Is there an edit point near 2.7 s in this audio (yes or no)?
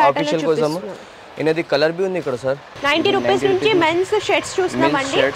yes